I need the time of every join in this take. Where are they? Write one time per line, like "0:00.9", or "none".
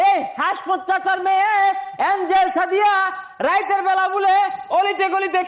none